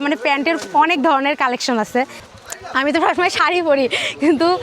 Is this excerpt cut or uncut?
cut